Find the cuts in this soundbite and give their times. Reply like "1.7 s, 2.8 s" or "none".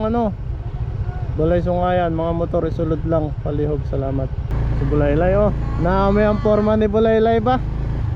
4.5 s